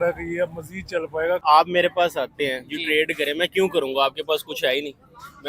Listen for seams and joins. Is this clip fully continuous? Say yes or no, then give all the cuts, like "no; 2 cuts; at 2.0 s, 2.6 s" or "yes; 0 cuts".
no; 1 cut; at 1.4 s